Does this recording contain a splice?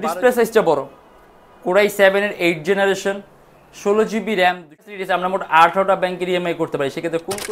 yes; 1 cut; at 4.9 s

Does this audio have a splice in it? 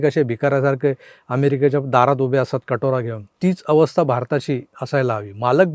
yes; 2 cuts; at 3.2 s, 4.7 s

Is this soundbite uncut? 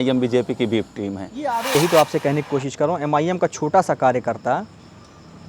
no; 1 cut; at 1.6 s

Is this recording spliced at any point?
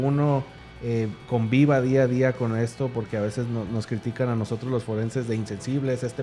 no; 0 cuts

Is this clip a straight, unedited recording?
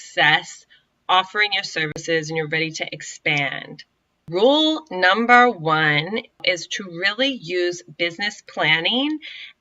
no; 2 cuts; at 4.3 s, 6.4 s

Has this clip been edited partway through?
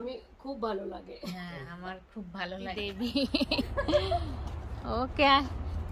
yes; 1 cut; at 2.8 s

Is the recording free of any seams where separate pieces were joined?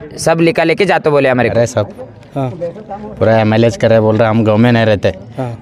no; 1 cut; at 1.5 s

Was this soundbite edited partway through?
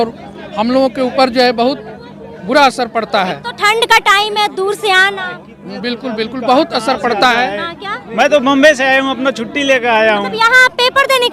no; 0 cuts

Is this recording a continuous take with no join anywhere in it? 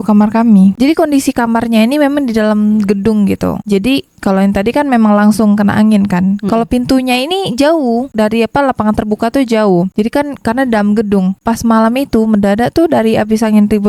yes; 0 cuts

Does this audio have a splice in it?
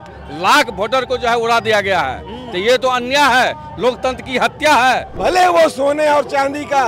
yes; 1 cut; at 5.1 s

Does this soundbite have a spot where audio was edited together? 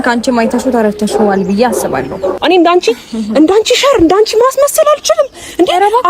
yes; 1 cut; at 2.4 s

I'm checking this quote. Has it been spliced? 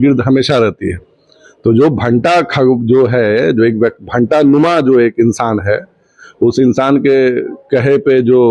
no; 0 cuts

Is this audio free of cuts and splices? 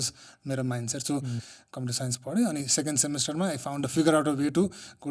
no; 1 cut; at 1.4 s

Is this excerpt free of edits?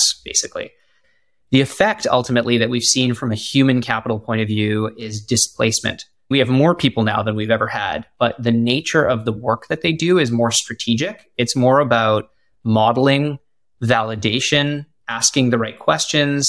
no; 2 cuts; at 1.0 s, 6.3 s

